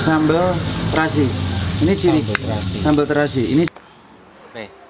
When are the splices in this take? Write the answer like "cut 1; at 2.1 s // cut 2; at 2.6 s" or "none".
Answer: cut 1; at 3.7 s